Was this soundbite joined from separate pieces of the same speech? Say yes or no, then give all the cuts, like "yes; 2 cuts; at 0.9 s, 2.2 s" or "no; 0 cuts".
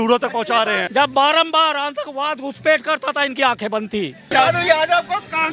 yes; 2 cuts; at 0.8 s, 4.3 s